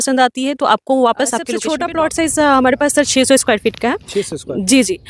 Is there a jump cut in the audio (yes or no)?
yes